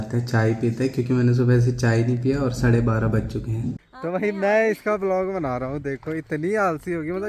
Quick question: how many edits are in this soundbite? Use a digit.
1